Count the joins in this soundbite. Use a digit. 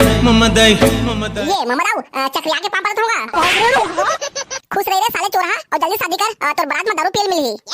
1